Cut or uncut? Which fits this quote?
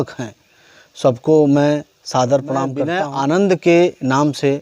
cut